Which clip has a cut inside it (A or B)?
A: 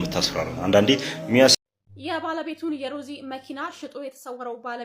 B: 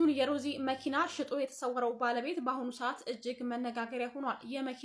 A